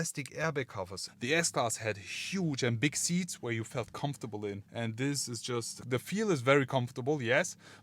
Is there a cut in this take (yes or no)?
yes